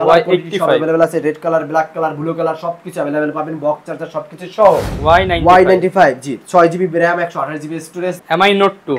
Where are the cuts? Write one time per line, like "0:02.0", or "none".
0:04.9
0:08.2